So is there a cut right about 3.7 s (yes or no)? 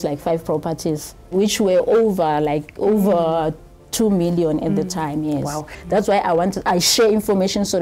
no